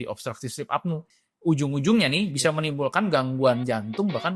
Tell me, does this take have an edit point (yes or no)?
yes